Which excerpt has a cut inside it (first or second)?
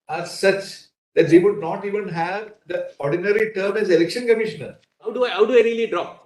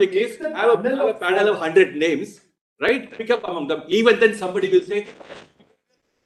first